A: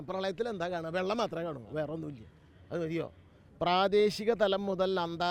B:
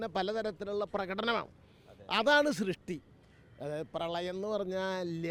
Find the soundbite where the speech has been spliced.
A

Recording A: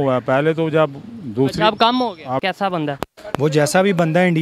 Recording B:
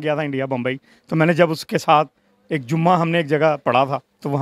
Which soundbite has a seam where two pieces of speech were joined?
A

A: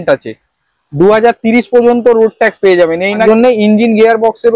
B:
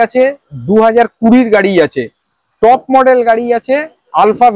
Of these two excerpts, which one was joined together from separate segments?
A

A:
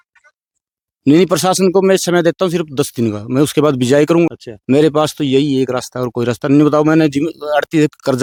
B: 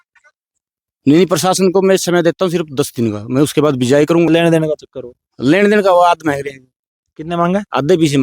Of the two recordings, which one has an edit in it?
B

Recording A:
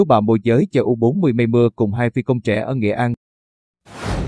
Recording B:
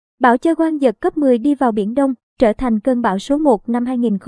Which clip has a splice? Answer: A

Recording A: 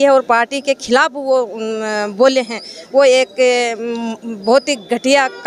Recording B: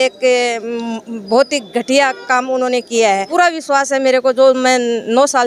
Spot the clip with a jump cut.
B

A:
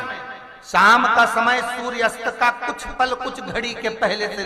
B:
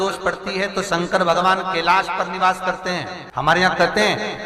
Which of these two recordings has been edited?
B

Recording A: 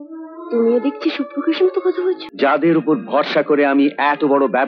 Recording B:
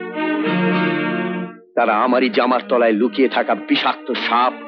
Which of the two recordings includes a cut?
A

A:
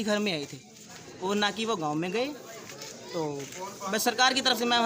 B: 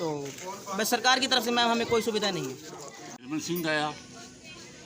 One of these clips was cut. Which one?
B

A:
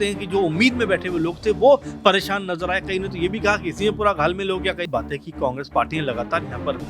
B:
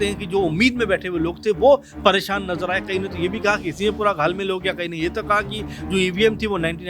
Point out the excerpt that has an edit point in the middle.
A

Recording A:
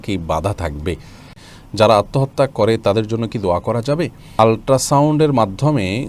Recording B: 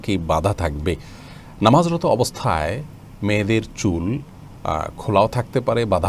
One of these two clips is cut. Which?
A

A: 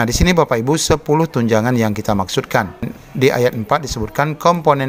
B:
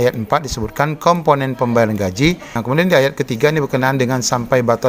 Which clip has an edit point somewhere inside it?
B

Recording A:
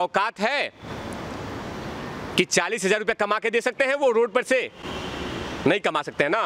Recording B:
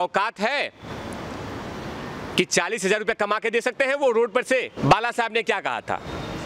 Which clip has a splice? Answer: B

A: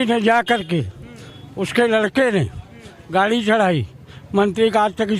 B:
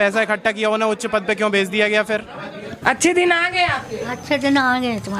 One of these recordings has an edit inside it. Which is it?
B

